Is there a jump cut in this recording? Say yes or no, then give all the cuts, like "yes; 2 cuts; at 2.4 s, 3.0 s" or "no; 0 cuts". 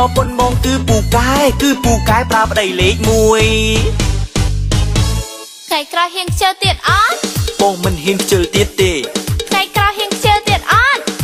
no; 0 cuts